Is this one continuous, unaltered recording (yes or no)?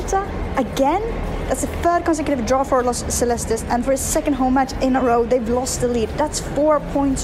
yes